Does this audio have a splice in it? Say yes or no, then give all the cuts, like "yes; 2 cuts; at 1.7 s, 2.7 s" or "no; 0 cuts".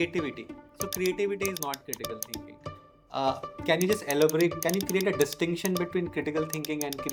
no; 0 cuts